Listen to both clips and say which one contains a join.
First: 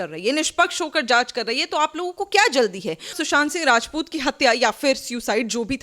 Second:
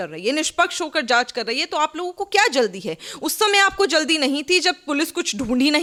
first; 1 cut; at 3.1 s

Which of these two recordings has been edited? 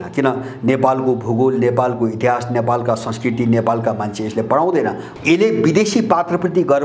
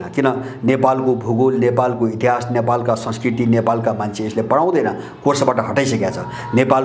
first; 1 cut; at 5.1 s

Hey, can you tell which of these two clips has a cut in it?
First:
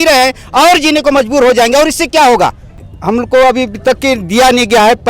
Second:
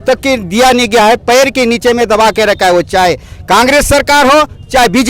first; 1 cut; at 2.8 s

